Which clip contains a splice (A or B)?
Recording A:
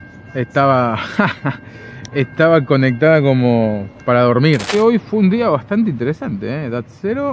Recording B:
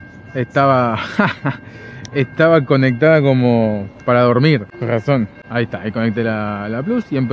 A